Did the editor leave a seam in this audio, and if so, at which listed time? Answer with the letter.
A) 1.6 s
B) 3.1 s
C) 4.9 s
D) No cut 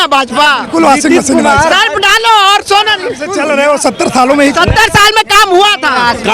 B